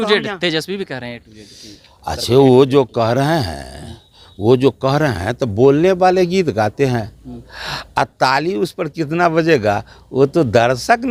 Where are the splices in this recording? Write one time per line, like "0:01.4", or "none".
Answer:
none